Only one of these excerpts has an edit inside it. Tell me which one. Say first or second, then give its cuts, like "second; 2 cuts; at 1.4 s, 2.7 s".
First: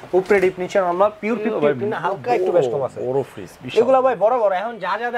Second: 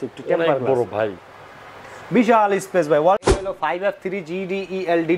second; 1 cut; at 3.3 s